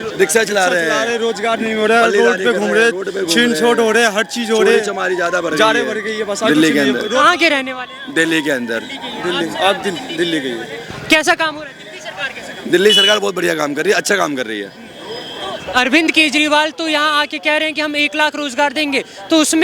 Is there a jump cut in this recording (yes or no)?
no